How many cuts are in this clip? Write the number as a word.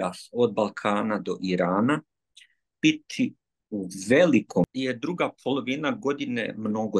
one